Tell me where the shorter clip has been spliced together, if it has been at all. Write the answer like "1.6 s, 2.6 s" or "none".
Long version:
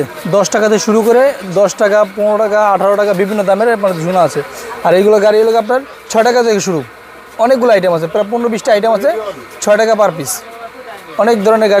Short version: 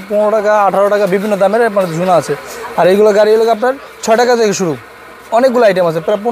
none